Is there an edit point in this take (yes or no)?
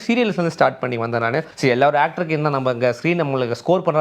yes